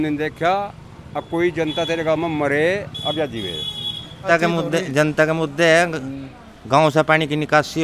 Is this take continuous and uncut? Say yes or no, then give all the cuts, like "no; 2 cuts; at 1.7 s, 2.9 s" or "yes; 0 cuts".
no; 1 cut; at 4.3 s